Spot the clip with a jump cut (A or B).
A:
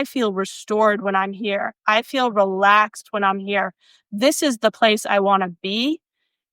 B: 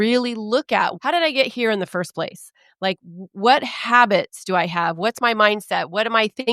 B